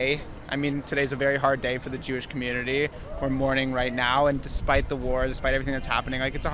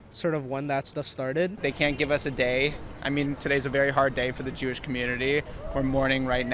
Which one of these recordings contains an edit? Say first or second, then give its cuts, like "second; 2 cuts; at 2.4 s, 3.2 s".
second; 1 cut; at 1.6 s